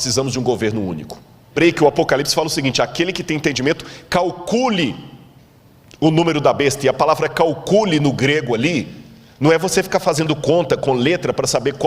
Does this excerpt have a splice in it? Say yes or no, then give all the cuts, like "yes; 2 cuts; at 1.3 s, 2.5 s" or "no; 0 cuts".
yes; 1 cut; at 1.5 s